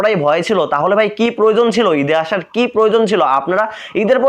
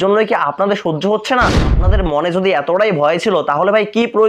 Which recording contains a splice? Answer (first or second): second